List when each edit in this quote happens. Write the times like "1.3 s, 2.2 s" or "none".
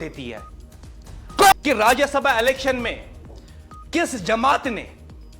1.5 s